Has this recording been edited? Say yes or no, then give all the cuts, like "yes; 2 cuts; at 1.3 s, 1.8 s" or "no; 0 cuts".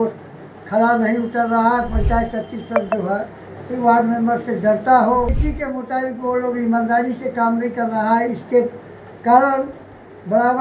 yes; 1 cut; at 5.4 s